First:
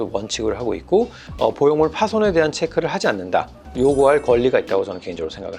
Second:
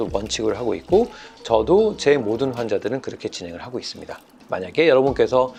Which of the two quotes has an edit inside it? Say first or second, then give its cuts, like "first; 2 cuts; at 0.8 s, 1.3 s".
first; 2 cuts; at 1.2 s, 3.6 s